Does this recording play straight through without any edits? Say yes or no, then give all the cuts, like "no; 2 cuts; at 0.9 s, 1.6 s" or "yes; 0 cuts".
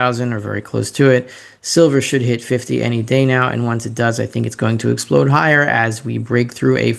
yes; 0 cuts